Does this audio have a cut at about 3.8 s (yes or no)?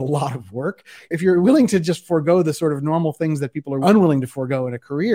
yes